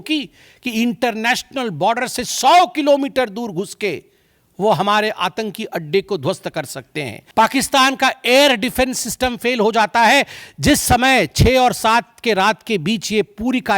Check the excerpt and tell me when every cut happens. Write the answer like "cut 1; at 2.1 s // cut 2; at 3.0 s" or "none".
cut 1; at 7.2 s